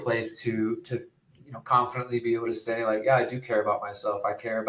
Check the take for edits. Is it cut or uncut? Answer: uncut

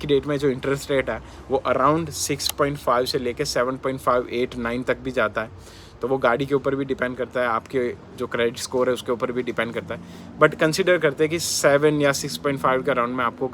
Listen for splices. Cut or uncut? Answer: uncut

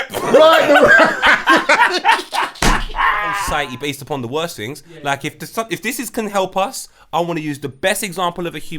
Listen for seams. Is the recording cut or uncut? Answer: cut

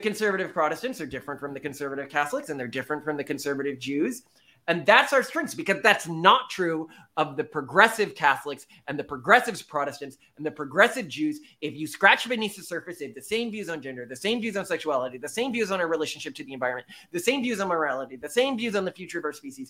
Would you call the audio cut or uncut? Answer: uncut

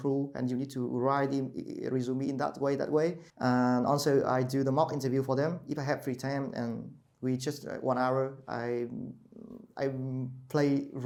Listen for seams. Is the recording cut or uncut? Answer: uncut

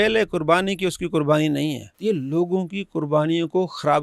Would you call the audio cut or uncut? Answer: cut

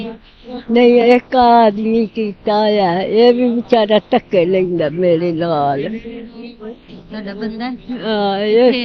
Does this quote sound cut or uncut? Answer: uncut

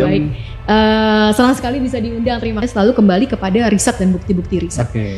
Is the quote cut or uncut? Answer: cut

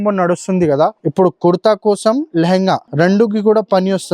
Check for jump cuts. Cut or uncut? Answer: cut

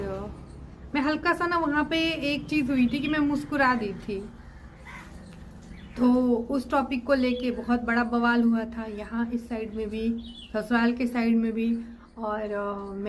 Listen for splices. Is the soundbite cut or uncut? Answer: uncut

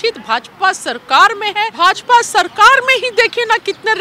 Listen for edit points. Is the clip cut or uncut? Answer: cut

